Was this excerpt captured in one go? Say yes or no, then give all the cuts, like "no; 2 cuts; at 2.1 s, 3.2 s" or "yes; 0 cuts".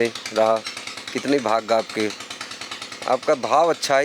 yes; 0 cuts